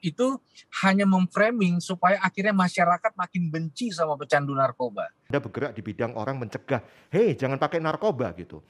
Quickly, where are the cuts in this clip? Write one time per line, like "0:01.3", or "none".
0:05.2